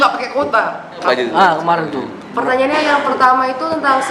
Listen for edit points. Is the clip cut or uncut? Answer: cut